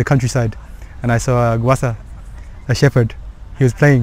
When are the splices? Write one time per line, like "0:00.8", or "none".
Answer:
none